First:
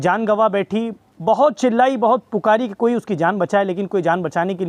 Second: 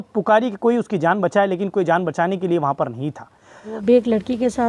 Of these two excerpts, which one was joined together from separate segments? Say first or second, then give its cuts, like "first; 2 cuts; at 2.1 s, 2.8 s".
second; 1 cut; at 3.7 s